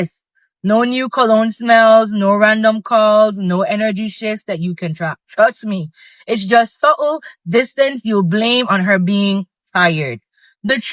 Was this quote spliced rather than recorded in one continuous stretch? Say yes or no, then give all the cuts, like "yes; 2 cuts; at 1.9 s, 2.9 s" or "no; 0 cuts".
yes; 1 cut; at 3.9 s